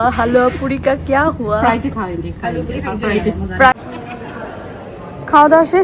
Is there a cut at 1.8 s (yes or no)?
no